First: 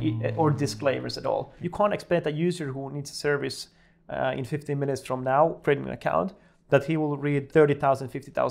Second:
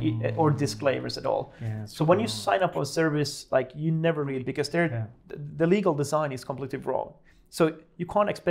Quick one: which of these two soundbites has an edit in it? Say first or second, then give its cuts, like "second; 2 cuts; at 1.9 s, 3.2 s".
first; 3 cuts; at 1.6 s, 5.6 s, 7.5 s